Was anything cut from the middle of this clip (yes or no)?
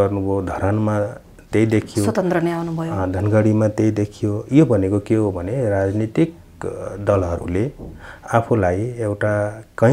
no